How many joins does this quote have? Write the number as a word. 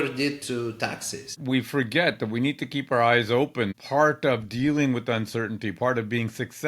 two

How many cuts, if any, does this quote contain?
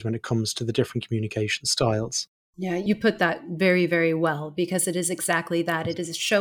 one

